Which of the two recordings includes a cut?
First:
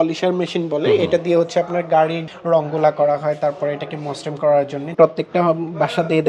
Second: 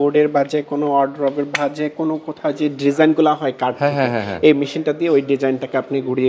first; 2 cuts; at 2.3 s, 4.8 s

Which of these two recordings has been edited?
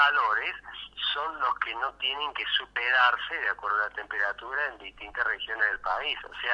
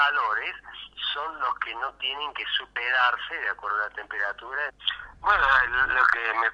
first; 1 cut; at 4.8 s

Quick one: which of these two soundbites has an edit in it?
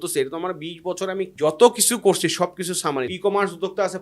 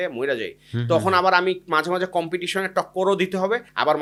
first; 2 cuts; at 1.3 s, 3.1 s

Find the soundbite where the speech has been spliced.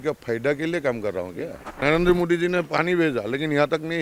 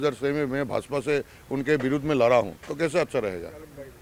first; 1 cut; at 1.8 s

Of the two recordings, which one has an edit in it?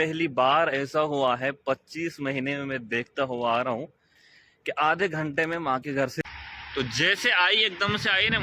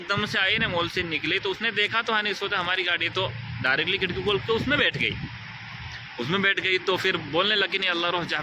first; 1 cut; at 6.2 s

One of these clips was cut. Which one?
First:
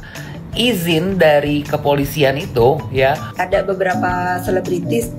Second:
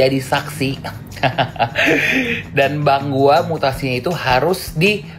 first; 1 cut; at 3.3 s

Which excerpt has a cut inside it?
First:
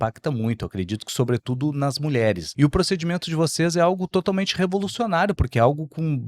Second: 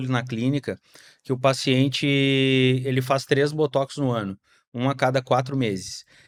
first; 1 cut; at 2.5 s

